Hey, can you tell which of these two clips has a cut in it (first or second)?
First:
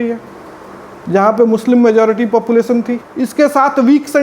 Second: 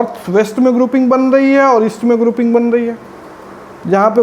first